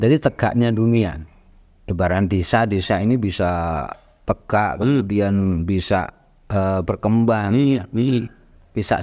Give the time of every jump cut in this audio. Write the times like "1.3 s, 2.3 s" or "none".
none